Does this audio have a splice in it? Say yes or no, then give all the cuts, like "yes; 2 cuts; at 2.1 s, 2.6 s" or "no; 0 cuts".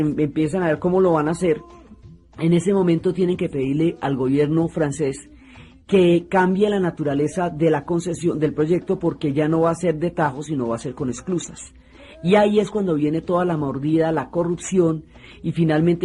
yes; 1 cut; at 10.8 s